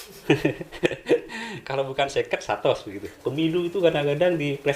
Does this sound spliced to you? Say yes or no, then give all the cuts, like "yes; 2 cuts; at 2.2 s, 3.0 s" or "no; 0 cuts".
yes; 1 cut; at 3.0 s